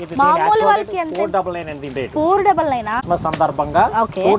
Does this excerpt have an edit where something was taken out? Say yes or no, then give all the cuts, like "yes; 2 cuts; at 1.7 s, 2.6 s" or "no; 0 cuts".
yes; 1 cut; at 2.9 s